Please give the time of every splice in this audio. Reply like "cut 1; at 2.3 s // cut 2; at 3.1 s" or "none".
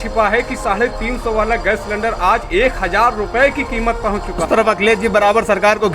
cut 1; at 4.4 s

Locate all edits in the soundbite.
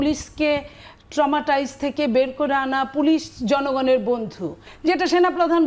cut 1; at 4.7 s

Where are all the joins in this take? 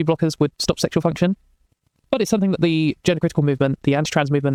none

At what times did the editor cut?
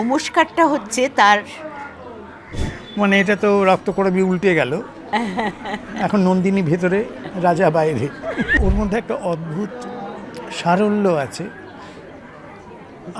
cut 1; at 2.6 s // cut 2; at 8.5 s

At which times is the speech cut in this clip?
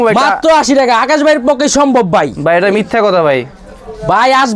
none

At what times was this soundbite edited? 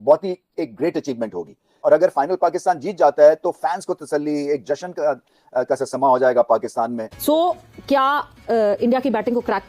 cut 1; at 1.7 s // cut 2; at 7.1 s

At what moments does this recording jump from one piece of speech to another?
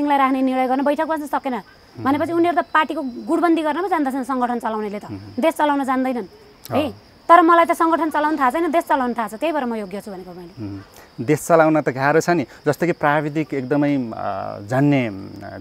none

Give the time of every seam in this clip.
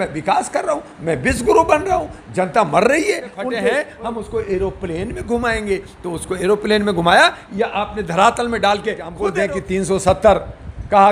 cut 1; at 3.6 s // cut 2; at 9.2 s

